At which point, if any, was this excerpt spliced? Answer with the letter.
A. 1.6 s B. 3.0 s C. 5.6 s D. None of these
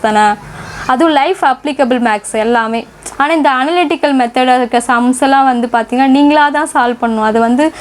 B